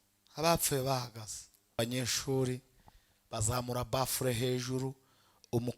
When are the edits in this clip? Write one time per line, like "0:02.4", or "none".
0:01.8